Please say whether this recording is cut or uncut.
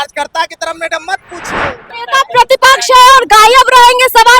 cut